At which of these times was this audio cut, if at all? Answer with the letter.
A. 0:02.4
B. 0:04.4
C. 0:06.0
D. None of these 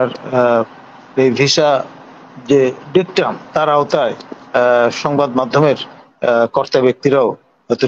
D